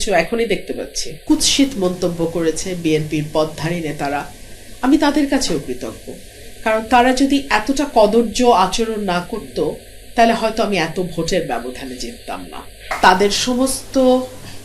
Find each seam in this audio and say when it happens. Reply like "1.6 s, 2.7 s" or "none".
1.1 s, 12.8 s

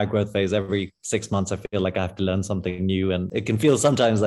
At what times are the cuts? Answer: 3.3 s

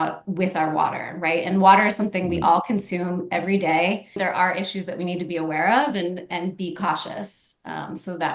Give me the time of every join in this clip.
4.2 s

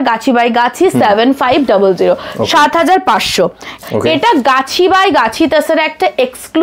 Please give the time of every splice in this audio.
3.8 s

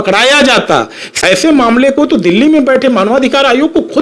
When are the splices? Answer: 1.2 s

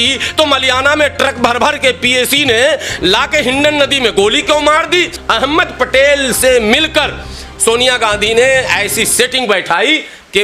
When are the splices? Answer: 5.2 s

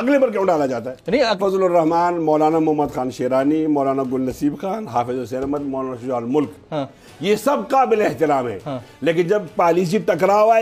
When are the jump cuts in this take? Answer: 1.4 s

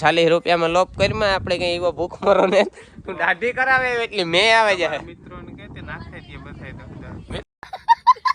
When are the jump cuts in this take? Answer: 7.3 s

